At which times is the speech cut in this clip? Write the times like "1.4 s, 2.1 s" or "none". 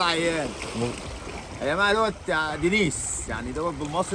none